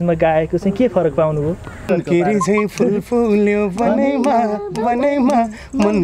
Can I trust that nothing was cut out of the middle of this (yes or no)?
no